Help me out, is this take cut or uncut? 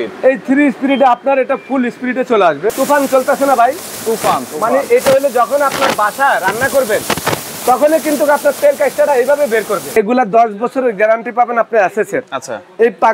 cut